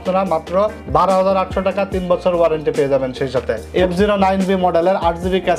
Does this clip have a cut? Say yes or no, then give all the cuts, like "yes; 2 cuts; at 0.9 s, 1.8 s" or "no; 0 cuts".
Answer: yes; 1 cut; at 3.7 s